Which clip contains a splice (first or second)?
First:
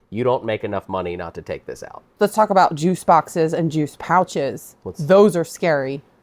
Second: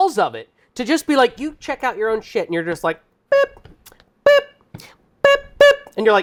first